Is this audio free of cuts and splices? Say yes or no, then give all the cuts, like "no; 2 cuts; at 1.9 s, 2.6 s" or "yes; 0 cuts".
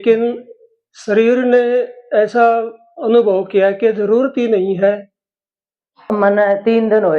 no; 1 cut; at 6.1 s